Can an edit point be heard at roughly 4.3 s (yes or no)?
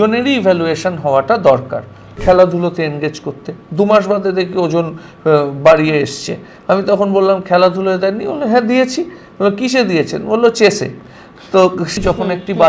no